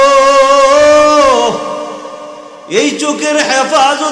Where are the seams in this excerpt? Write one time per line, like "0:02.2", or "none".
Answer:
none